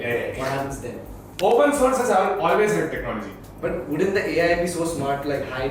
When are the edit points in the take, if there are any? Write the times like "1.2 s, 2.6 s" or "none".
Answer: 1.2 s, 3.4 s